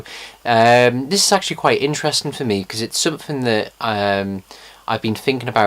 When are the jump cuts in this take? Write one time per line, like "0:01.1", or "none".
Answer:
0:04.3